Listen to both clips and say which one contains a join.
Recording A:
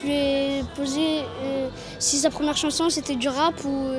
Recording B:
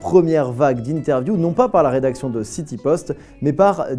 B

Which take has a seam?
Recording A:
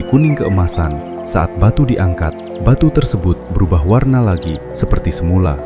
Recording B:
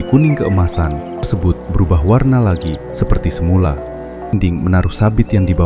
B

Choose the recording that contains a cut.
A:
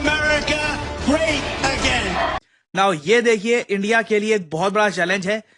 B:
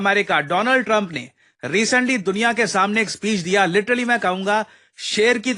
A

